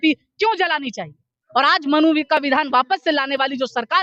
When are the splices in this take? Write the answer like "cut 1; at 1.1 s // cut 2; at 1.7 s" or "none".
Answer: none